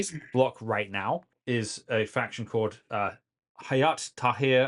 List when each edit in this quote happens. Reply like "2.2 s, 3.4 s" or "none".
1.3 s

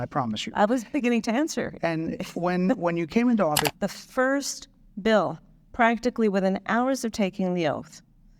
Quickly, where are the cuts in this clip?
3.7 s

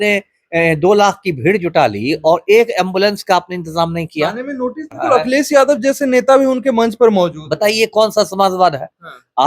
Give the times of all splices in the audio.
5.0 s

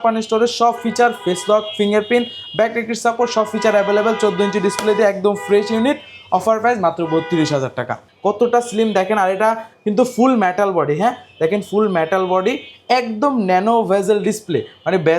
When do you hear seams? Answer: 8.0 s

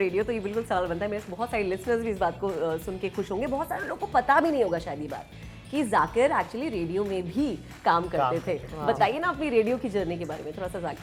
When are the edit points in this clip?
none

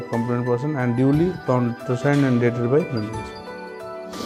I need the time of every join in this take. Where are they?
none

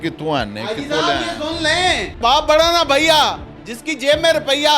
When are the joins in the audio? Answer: 2.2 s

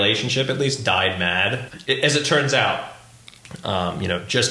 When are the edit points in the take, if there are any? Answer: 1.7 s

